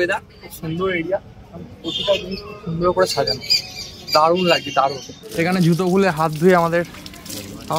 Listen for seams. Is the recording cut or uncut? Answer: cut